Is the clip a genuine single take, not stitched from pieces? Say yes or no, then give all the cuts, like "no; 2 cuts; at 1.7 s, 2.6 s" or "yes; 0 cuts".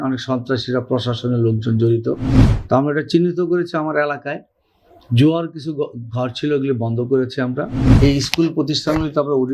no; 1 cut; at 7.8 s